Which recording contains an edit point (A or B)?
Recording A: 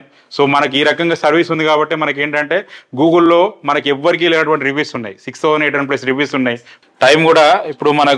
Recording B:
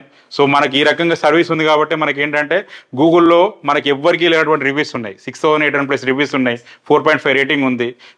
A